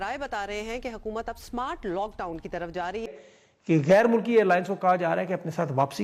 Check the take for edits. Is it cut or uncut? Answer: cut